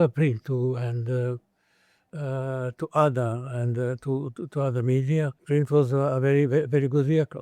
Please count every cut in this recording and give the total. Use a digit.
1